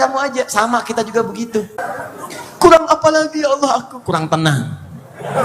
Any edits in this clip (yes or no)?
yes